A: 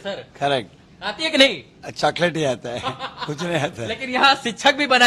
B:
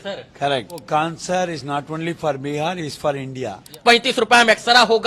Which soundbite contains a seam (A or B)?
B